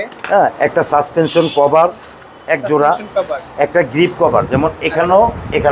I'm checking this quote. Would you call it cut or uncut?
uncut